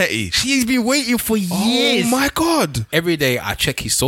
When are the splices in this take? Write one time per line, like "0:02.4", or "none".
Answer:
0:02.8

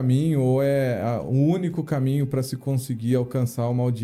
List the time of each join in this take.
none

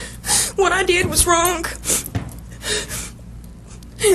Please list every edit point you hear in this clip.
none

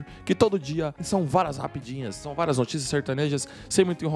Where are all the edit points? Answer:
0:01.0

